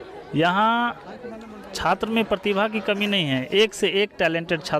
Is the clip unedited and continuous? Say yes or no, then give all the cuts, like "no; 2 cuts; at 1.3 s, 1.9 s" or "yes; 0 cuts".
yes; 0 cuts